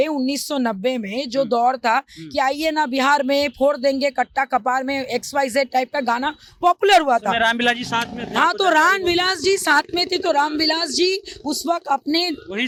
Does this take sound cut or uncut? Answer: uncut